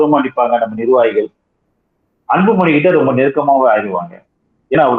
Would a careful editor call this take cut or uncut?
uncut